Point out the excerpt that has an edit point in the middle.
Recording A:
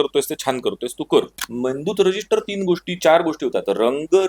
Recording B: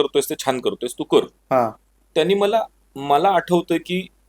A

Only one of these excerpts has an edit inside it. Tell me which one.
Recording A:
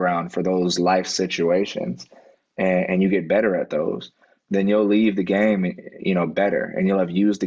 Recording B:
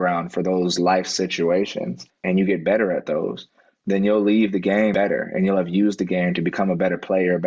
B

